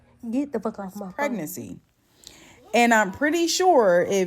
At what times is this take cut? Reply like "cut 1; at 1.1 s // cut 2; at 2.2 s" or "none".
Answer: cut 1; at 1.0 s